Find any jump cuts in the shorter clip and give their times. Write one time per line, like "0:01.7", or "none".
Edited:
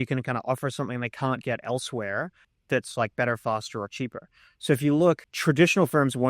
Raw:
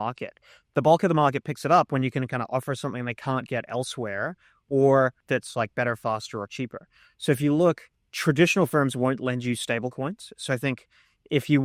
0:02.6
0:05.3